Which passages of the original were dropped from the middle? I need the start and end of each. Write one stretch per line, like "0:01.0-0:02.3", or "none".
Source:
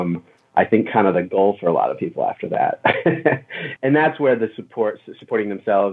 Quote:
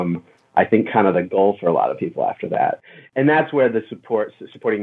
0:02.8-0:03.4